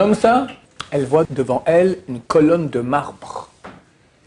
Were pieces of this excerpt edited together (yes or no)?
yes